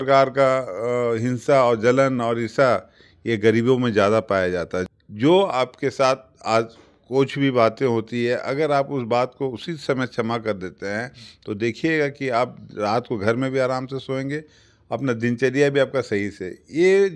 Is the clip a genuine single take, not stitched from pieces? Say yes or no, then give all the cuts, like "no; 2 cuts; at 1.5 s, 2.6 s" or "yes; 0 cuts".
no; 1 cut; at 4.9 s